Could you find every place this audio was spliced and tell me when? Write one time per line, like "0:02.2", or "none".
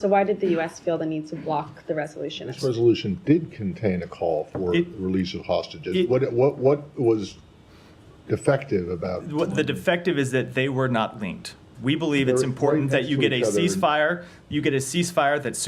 0:02.5